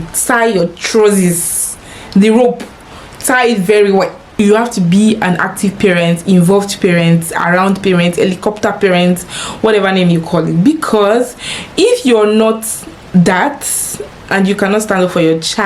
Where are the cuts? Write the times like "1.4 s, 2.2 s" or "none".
4.2 s